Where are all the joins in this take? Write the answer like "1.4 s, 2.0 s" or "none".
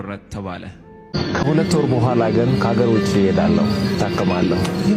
0.9 s

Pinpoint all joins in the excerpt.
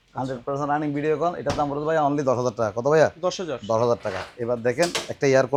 none

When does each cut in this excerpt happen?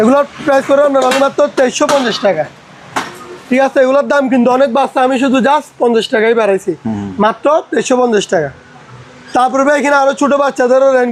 none

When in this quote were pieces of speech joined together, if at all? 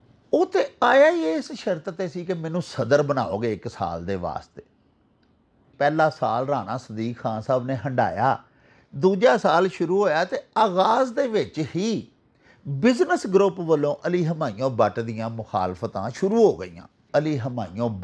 5.7 s, 17.1 s

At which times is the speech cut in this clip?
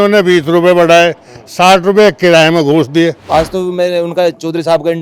3.2 s

